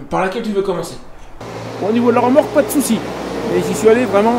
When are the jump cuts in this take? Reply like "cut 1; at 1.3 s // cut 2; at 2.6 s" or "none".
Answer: cut 1; at 1.4 s